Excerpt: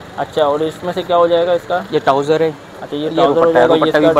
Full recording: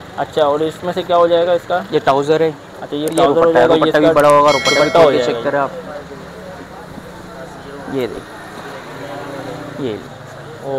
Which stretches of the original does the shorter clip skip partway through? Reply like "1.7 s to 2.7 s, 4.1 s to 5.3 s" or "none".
none